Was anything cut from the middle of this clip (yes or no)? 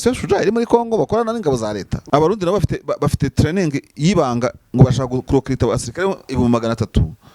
yes